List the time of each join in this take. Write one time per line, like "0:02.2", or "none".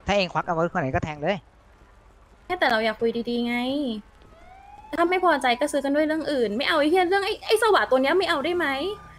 none